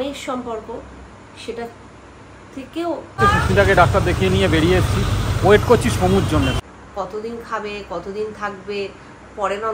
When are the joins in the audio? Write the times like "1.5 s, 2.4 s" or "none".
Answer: 3.2 s, 6.6 s